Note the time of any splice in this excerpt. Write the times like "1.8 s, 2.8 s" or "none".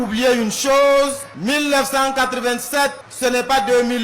1.3 s, 3.0 s

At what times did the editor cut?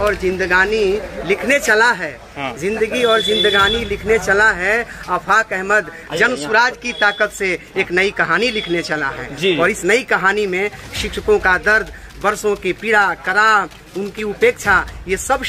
none

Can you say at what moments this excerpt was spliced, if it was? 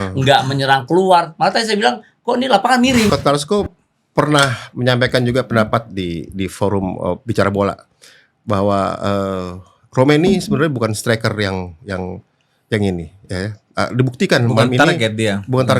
3.1 s

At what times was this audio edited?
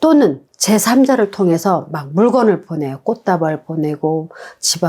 none

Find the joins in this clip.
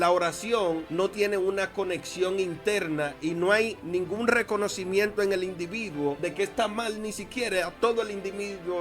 0.9 s, 3.8 s, 6.2 s

